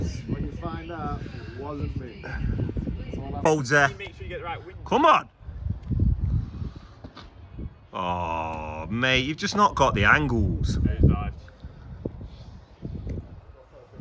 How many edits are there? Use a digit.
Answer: 1